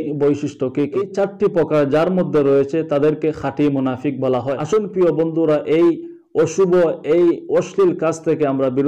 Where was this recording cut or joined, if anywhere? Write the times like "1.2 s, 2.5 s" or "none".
1.0 s, 4.5 s